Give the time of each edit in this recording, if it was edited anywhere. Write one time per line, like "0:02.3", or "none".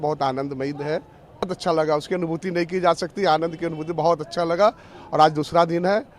0:01.5